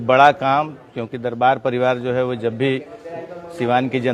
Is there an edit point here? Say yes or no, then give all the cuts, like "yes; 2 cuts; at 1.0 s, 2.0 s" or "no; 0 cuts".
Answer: no; 0 cuts